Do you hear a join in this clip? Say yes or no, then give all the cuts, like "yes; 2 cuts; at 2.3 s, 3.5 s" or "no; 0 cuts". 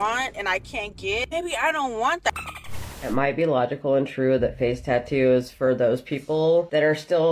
yes; 1 cut; at 2.8 s